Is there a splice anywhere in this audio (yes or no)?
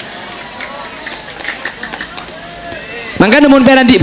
no